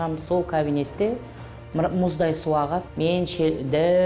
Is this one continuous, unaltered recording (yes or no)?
no